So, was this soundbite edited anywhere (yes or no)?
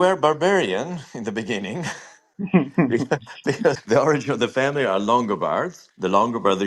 yes